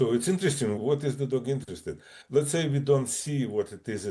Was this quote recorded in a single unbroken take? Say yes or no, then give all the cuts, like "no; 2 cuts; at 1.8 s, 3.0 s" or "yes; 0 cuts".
no; 2 cuts; at 0.8 s, 2.1 s